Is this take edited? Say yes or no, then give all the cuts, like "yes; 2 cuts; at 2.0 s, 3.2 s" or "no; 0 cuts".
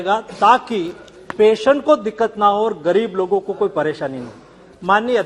no; 0 cuts